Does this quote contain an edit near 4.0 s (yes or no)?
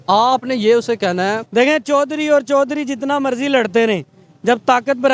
no